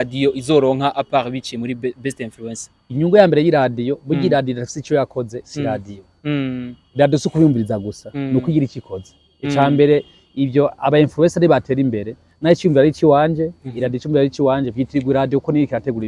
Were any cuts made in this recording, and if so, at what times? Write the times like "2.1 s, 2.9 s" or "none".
none